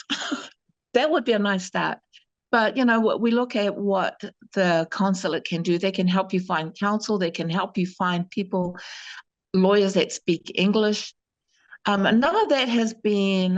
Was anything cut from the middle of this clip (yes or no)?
no